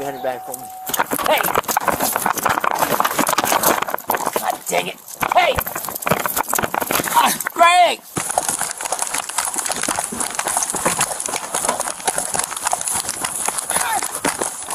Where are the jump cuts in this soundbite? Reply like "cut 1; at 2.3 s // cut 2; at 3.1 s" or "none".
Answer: cut 1; at 8.1 s // cut 2; at 9.3 s